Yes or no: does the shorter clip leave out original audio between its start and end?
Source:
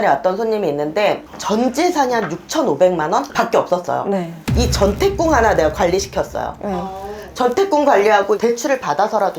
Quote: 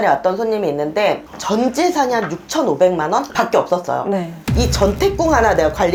no